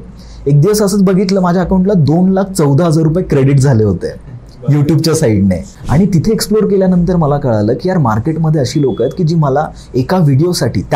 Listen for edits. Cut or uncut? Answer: cut